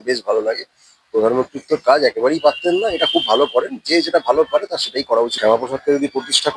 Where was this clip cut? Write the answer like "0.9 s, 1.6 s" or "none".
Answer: 5.4 s